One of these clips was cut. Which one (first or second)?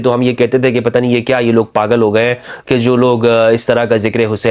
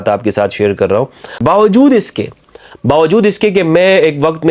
second